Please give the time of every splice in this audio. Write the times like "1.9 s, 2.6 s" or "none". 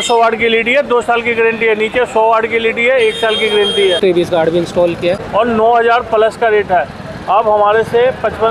4.0 s, 5.2 s